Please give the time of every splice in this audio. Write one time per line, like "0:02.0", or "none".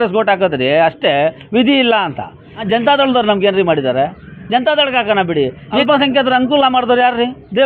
0:02.6
0:05.8